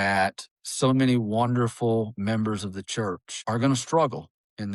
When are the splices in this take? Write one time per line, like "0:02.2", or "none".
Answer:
0:03.3